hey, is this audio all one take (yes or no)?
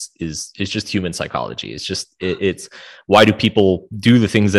yes